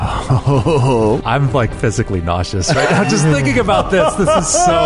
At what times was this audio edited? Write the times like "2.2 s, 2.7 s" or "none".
1.2 s